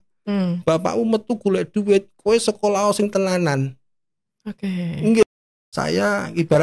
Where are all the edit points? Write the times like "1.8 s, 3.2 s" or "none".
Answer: 5.2 s